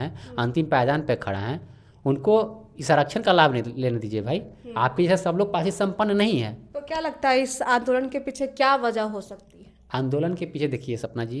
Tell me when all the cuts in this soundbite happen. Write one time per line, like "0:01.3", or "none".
none